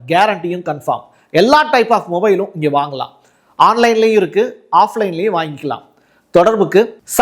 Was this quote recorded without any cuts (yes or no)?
yes